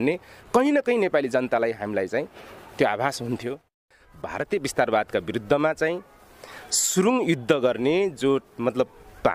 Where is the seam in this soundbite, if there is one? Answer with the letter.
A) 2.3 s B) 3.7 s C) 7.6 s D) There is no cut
B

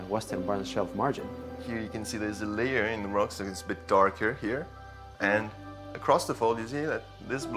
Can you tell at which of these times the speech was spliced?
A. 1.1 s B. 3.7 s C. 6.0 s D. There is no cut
D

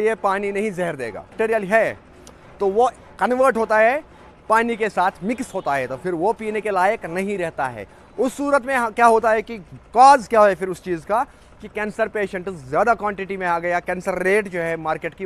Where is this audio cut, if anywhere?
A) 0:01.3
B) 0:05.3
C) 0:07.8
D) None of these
A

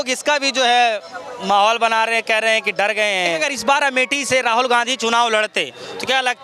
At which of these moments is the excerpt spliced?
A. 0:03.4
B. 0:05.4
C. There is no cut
A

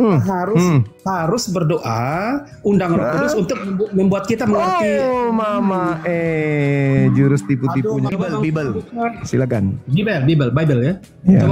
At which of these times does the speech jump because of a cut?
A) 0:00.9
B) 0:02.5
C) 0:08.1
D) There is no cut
C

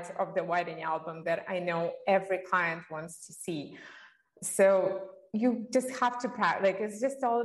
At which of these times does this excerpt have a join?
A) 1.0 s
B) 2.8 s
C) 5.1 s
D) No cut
D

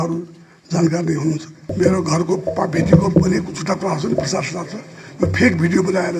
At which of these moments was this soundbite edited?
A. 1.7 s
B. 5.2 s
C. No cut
A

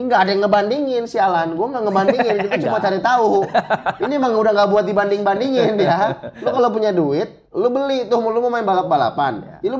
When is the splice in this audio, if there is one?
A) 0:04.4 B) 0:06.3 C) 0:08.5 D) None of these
B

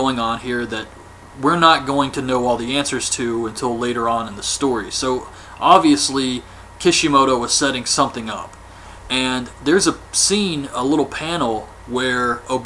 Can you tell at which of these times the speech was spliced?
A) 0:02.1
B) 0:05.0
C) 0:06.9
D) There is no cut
B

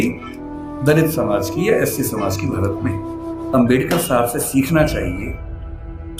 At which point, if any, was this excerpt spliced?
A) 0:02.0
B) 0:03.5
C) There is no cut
B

